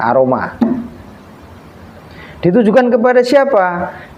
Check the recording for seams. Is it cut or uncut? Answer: uncut